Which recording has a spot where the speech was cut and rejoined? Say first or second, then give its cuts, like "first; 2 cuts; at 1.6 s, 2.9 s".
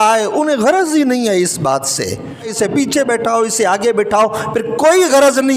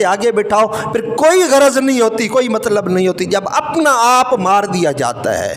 first; 1 cut; at 2.5 s